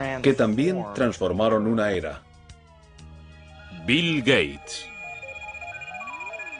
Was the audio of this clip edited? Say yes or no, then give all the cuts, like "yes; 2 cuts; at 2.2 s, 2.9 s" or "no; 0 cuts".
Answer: no; 0 cuts